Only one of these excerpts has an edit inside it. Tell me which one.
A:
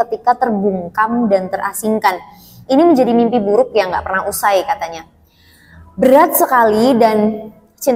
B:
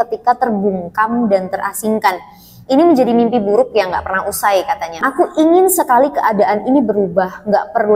B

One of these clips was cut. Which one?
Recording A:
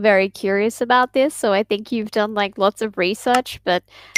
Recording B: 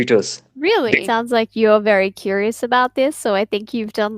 B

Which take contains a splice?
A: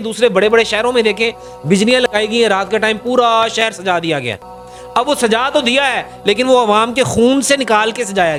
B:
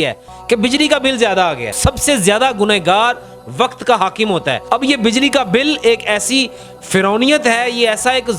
B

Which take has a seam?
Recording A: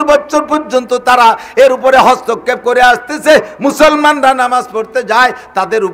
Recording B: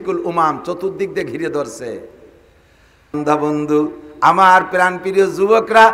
B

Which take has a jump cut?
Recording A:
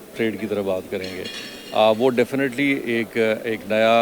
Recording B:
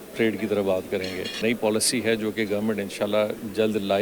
B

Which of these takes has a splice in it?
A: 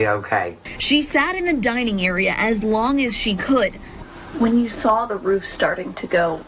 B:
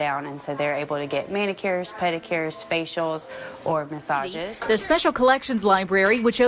B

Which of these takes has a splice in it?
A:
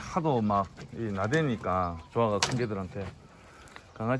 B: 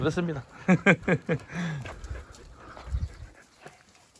B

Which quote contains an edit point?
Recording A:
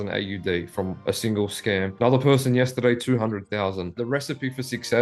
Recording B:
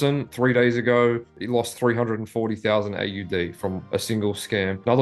A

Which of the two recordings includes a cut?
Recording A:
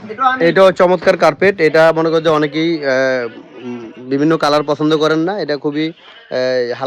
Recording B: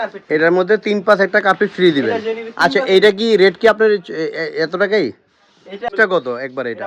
B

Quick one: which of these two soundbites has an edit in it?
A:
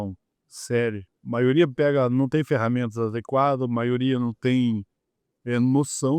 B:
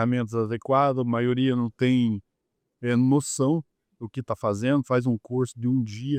A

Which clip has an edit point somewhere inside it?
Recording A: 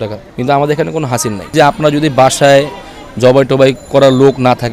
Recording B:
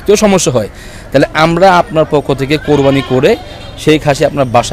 A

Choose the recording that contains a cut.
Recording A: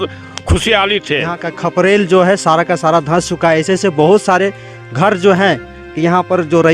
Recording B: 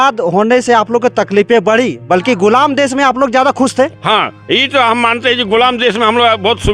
A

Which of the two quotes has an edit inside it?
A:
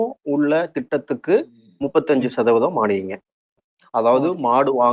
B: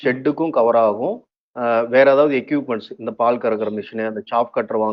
A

